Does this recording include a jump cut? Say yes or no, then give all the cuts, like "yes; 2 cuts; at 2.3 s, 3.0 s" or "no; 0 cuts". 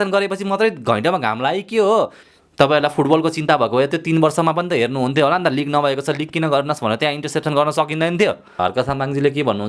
yes; 2 cuts; at 2.2 s, 8.5 s